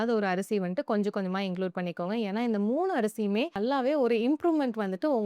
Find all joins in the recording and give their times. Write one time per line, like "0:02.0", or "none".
0:03.5